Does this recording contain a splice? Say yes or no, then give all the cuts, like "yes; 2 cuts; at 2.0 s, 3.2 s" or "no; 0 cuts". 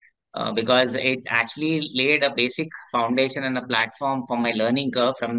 no; 0 cuts